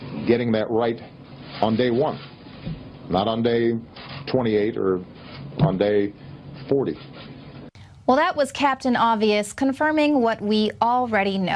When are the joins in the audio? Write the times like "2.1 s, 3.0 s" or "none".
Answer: none